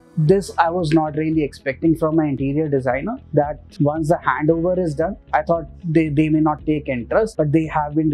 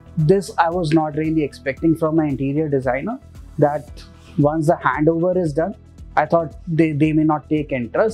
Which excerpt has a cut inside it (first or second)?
first